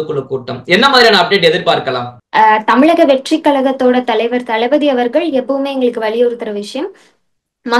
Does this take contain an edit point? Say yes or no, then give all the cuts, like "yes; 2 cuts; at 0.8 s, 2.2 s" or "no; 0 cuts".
no; 0 cuts